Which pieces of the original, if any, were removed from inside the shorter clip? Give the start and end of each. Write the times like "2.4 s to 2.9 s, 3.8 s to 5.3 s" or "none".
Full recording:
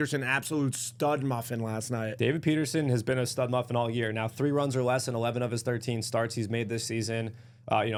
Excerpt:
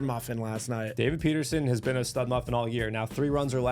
none